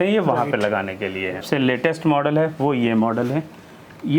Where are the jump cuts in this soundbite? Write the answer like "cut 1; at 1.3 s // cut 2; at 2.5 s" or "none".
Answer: cut 1; at 1.4 s